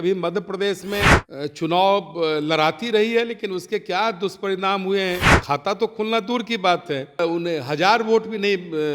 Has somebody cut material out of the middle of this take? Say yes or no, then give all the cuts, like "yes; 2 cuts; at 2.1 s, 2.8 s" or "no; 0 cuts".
yes; 3 cuts; at 1.2 s, 5.3 s, 7.2 s